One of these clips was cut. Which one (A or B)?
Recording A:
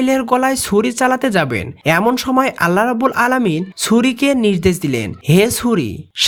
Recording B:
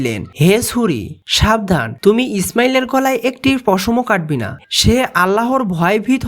B